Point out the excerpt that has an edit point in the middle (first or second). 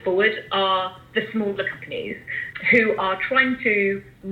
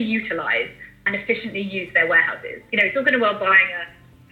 second